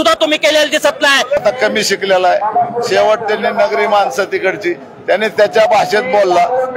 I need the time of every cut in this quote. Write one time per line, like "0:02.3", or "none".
0:01.4